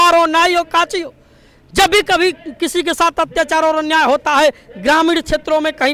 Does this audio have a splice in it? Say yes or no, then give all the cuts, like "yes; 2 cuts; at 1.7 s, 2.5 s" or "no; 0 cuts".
no; 0 cuts